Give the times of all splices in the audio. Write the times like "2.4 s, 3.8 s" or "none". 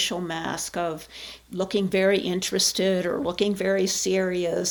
none